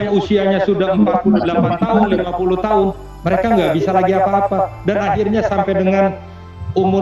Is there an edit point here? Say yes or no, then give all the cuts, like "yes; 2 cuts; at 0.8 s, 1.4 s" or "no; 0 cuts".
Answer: no; 0 cuts